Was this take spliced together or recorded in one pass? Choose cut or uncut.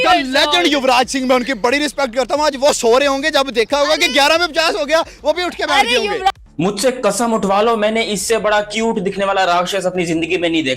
cut